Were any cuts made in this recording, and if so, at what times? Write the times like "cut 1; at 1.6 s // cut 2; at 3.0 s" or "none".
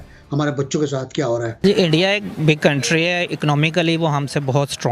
cut 1; at 1.6 s